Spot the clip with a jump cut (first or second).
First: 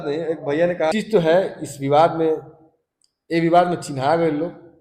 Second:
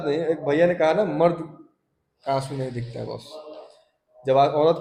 first